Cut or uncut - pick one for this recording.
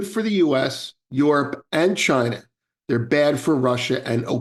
uncut